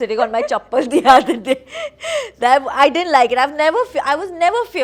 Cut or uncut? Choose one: uncut